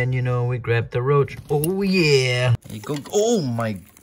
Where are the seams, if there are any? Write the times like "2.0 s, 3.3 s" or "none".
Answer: 2.5 s